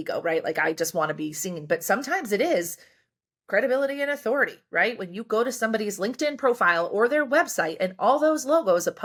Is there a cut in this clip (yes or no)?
no